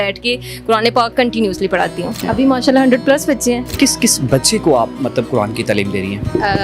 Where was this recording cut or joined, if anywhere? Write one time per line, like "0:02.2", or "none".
0:02.2
0:03.7